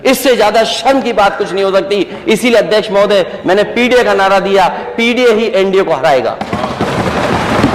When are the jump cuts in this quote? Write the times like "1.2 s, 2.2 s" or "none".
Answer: none